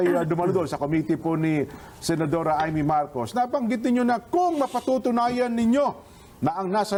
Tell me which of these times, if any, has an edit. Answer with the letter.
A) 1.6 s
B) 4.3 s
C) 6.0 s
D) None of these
D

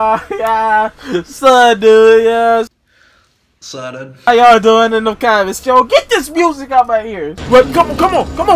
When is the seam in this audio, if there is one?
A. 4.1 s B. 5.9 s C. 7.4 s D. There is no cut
C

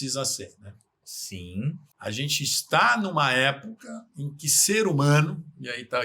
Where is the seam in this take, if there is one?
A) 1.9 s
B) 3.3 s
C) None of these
A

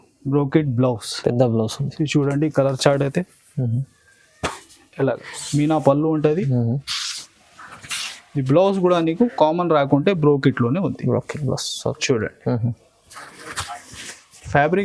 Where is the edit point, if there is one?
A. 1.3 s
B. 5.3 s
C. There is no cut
B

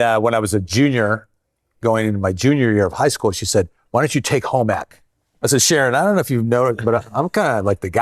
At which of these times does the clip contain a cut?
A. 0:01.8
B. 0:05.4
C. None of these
B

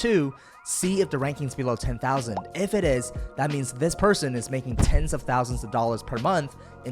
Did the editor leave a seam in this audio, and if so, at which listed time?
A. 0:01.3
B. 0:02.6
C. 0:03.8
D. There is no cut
B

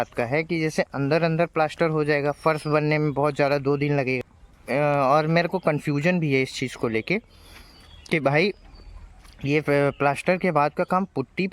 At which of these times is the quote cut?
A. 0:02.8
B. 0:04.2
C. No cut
B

